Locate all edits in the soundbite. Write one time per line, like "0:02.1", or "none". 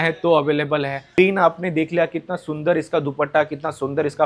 0:01.2